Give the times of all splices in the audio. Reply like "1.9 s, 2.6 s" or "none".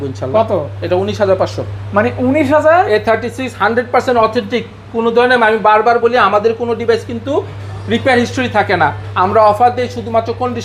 none